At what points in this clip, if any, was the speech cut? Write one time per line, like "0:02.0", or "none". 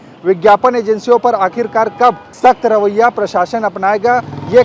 0:02.3